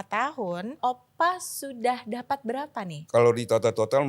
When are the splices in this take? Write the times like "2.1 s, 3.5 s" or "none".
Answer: 0.8 s, 3.0 s